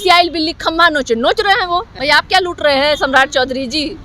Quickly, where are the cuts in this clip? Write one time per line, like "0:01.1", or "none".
0:01.9